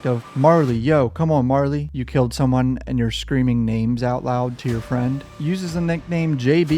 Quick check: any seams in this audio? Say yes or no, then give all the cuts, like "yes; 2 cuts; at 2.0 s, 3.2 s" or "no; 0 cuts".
yes; 2 cuts; at 2.0 s, 5.3 s